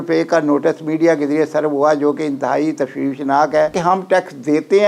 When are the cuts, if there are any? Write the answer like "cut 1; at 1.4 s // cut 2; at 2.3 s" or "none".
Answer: cut 1; at 3.8 s